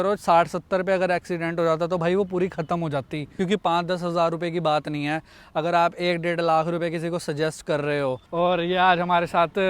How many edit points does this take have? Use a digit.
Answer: 2